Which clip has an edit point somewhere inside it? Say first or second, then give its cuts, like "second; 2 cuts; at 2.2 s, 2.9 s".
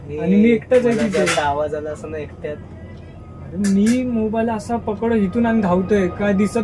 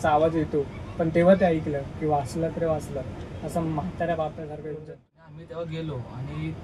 second; 1 cut; at 4.8 s